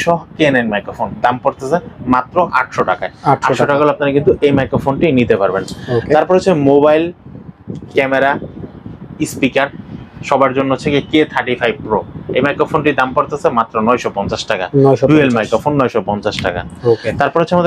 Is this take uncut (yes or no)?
yes